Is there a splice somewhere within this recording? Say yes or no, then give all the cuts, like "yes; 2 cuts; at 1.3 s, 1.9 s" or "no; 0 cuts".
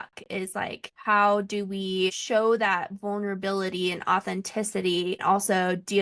yes; 3 cuts; at 0.9 s, 2.2 s, 5.2 s